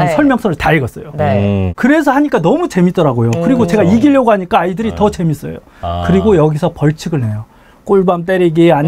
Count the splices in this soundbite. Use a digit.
1